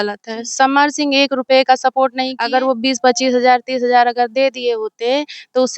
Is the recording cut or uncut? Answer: cut